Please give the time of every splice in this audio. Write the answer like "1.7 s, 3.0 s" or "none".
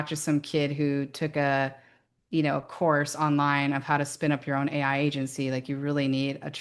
none